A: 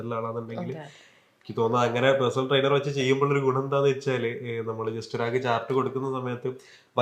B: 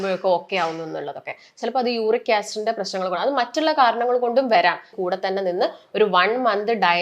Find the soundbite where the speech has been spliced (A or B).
B